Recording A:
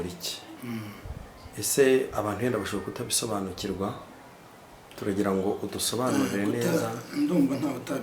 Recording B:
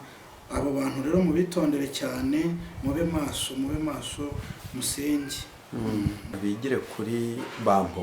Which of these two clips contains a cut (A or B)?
B